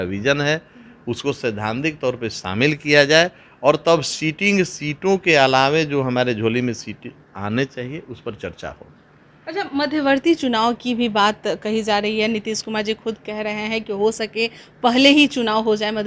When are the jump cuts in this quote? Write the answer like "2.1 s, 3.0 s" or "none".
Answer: none